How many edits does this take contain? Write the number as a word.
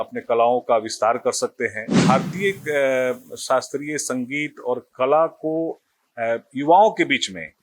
one